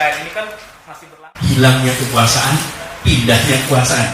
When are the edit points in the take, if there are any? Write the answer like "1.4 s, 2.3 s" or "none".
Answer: 1.0 s